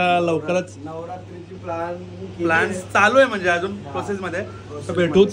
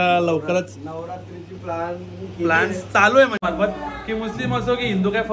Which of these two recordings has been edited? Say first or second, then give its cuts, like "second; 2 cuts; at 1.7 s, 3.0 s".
second; 1 cut; at 3.4 s